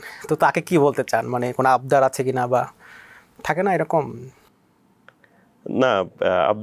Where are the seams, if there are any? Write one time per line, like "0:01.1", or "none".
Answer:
none